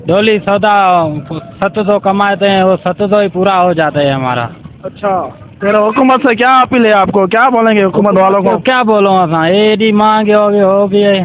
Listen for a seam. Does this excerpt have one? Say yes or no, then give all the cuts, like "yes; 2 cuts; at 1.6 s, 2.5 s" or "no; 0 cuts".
no; 0 cuts